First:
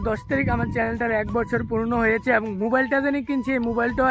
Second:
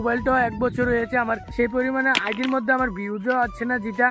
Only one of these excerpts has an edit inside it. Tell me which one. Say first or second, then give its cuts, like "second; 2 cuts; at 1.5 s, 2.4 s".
second; 1 cut; at 1.4 s